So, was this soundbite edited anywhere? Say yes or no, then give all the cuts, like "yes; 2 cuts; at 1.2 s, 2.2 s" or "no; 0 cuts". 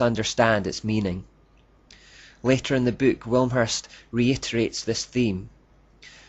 yes; 1 cut; at 3.5 s